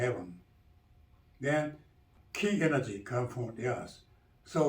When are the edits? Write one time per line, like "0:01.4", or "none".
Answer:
0:02.1